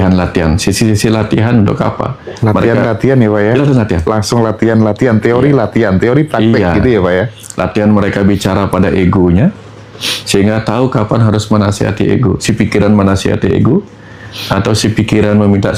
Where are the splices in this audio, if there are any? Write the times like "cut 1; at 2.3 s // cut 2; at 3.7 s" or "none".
none